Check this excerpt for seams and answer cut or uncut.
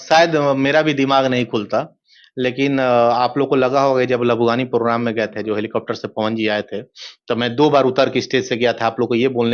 uncut